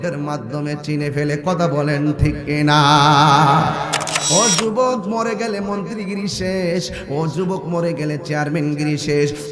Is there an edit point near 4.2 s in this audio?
yes; 1 cut; at 4.2 s

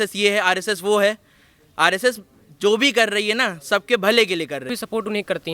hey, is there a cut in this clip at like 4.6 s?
yes; 1 cut; at 4.6 s

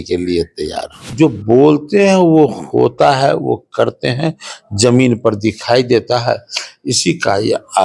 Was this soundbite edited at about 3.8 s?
no; 1 cut; at 1.1 s

